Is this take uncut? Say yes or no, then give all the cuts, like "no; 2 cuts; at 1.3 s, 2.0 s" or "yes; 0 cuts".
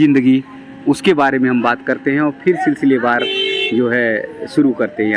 yes; 0 cuts